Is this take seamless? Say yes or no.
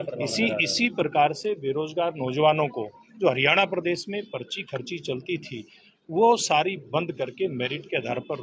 yes